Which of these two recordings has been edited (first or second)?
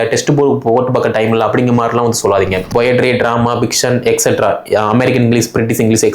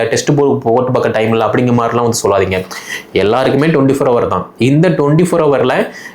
first